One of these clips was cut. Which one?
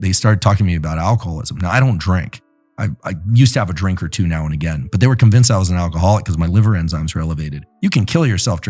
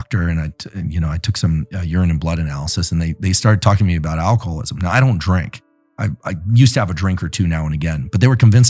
first; 1 cut; at 7.6 s

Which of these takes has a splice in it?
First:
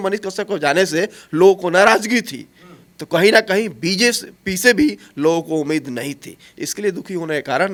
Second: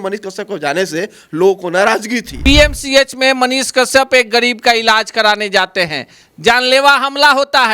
second; 1 cut; at 2.3 s

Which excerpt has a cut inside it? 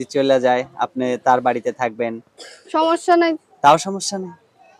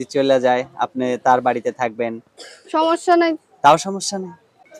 second; 1 cut; at 0.9 s

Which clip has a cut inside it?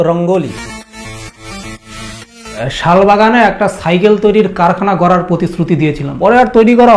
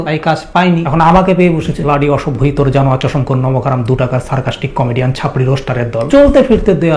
first; 1 cut; at 2.7 s

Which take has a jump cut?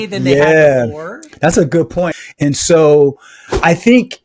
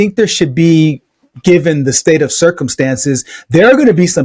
first; 1 cut; at 2.1 s

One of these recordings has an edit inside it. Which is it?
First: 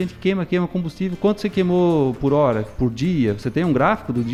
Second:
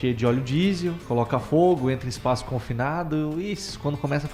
second; 1 cut; at 1.0 s

